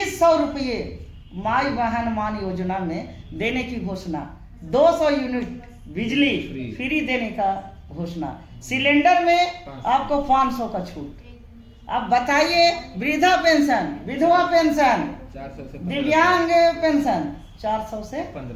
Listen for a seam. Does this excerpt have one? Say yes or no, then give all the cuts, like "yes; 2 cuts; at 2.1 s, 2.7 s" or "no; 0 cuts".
no; 0 cuts